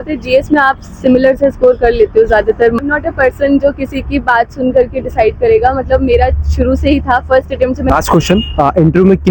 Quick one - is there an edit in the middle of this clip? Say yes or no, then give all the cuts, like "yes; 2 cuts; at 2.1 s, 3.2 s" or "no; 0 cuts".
yes; 2 cuts; at 2.8 s, 7.9 s